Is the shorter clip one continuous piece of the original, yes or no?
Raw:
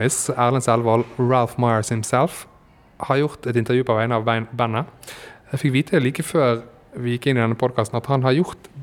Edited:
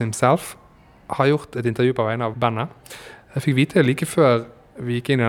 no